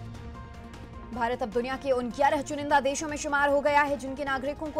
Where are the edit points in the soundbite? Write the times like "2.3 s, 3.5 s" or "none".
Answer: 1.0 s